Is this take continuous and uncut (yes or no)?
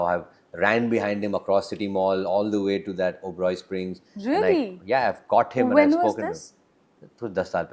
yes